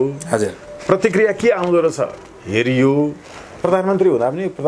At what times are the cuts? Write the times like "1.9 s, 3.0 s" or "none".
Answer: 3.6 s

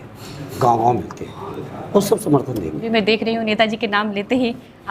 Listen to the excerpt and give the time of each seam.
2.9 s

